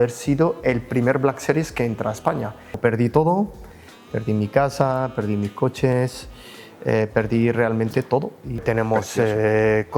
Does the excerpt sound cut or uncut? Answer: cut